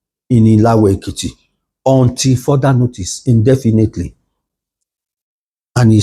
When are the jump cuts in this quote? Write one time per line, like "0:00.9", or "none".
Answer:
none